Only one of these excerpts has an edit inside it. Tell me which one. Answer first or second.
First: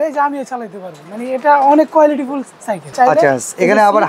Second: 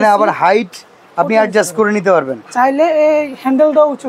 first